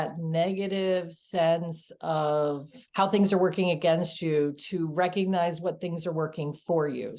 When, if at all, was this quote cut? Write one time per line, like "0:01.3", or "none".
0:02.8